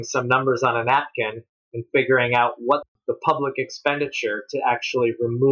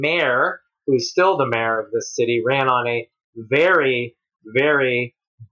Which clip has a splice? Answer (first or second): first